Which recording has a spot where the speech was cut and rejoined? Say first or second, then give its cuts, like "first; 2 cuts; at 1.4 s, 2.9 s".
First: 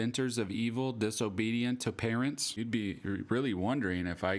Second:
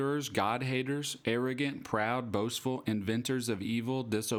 first; 1 cut; at 2.5 s